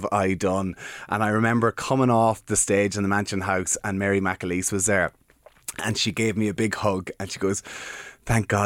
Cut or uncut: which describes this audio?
uncut